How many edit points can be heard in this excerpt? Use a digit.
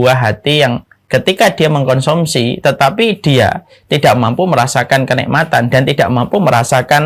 1